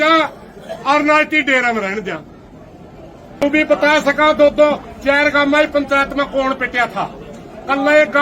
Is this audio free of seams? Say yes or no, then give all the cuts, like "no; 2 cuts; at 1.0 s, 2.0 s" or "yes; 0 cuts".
no; 1 cut; at 3.4 s